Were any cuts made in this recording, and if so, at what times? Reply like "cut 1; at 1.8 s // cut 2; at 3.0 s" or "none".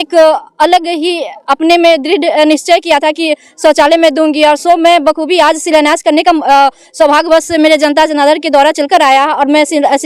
none

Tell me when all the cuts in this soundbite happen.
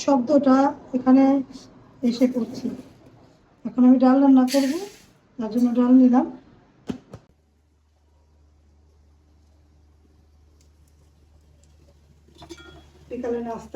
cut 1; at 7.3 s

